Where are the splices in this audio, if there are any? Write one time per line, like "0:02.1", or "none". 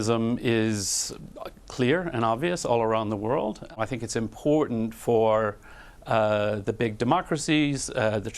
0:03.7